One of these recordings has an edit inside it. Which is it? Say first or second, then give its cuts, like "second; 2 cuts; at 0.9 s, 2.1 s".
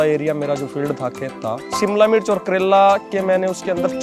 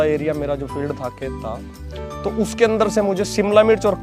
first; 1 cut; at 1.7 s